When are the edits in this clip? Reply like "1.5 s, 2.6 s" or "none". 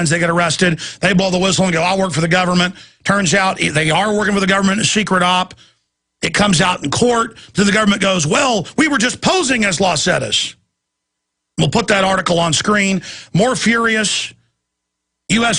9.0 s